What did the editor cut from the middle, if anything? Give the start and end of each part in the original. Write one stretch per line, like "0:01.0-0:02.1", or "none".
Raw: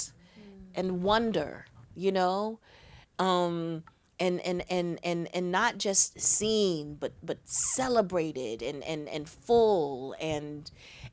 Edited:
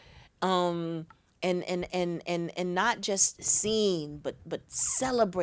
none